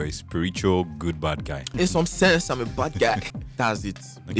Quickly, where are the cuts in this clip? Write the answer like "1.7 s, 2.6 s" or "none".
1.7 s, 3.2 s